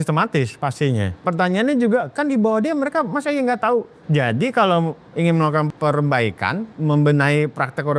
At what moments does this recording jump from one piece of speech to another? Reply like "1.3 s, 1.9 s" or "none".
1.1 s, 4.0 s, 5.7 s, 6.7 s

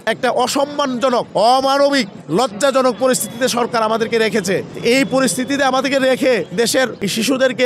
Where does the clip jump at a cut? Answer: none

